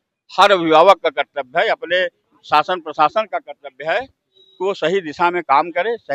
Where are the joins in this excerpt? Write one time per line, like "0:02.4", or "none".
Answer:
none